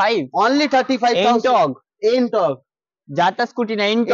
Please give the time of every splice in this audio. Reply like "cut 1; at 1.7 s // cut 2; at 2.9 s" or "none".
none